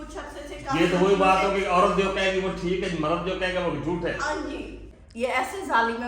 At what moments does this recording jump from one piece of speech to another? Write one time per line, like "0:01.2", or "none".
0:04.8